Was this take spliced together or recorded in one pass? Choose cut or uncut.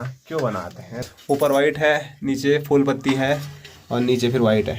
cut